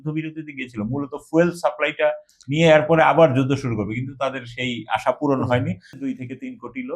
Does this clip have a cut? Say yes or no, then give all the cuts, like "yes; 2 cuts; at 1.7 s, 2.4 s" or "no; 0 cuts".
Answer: yes; 1 cut; at 5.9 s